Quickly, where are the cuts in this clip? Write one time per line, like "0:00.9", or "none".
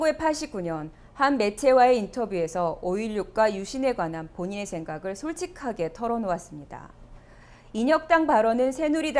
none